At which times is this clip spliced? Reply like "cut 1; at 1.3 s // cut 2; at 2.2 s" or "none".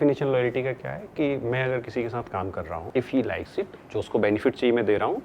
cut 1; at 2.8 s